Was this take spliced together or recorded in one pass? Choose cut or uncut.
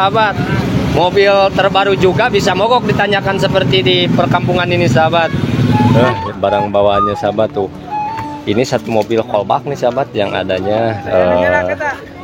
cut